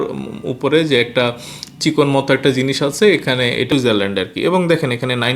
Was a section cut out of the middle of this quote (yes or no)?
yes